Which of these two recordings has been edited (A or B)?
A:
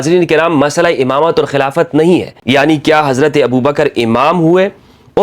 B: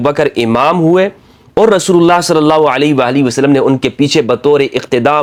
A